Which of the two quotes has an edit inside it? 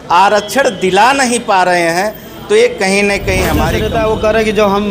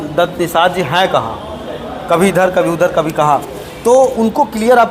first; 1 cut; at 3.7 s

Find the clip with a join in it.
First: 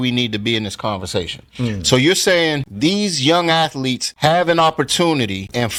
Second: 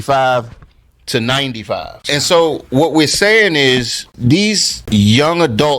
second; 1 cut; at 1.9 s

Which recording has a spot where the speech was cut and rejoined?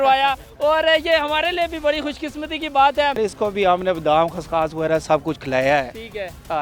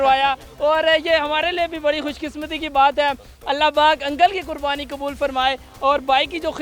first; 1 cut; at 3.2 s

